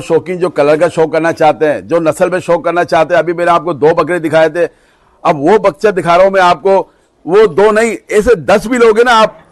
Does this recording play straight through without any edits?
yes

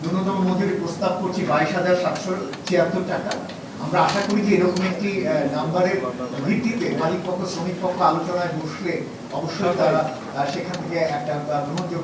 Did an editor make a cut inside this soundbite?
no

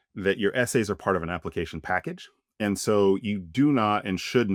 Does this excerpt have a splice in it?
no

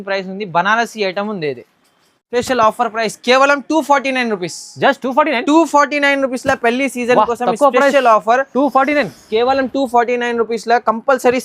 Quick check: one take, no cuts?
no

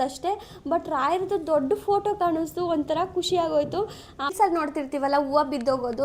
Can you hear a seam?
yes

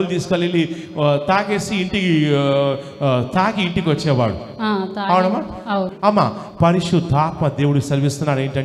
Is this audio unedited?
no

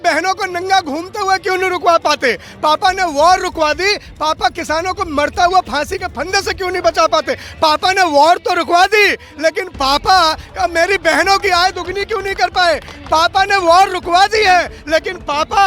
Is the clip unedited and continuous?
yes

